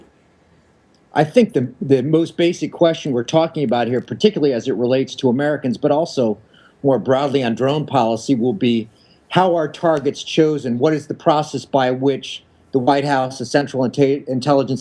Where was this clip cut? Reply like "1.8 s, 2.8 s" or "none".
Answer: 3.8 s